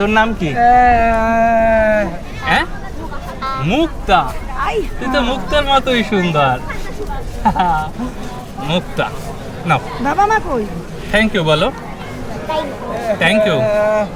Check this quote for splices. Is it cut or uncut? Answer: uncut